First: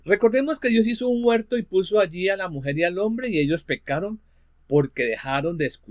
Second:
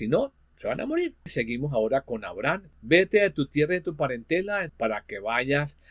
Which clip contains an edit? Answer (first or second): second